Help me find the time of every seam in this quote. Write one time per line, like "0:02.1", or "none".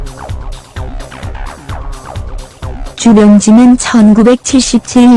0:01.0